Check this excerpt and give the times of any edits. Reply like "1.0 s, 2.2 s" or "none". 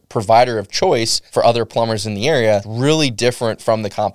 1.2 s, 2.7 s